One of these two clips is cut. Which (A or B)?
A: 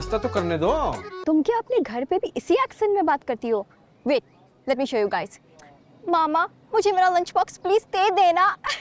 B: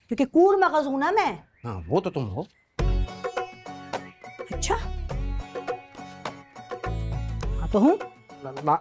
A